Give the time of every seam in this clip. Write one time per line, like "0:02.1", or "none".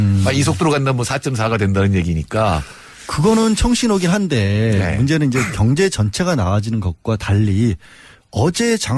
0:03.4